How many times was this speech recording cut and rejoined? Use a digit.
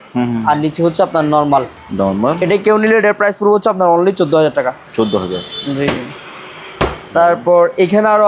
0